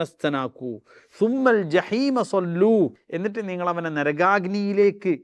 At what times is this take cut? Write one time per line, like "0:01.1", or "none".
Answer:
0:03.0